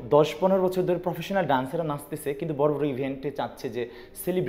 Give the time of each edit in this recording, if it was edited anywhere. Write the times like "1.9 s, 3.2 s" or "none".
none